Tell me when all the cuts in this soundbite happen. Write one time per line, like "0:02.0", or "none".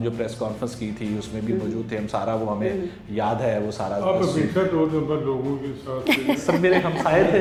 none